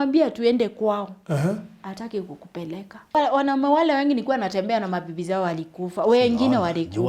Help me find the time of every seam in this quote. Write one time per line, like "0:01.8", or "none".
0:03.2